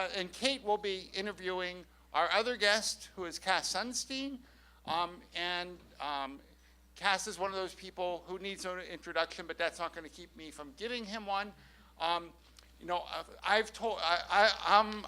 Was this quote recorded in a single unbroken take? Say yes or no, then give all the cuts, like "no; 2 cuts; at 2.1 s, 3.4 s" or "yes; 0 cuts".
no; 1 cut; at 1.8 s